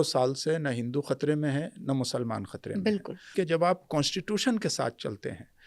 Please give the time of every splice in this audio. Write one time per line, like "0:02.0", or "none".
0:03.3